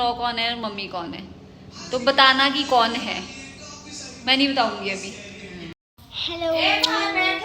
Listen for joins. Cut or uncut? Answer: cut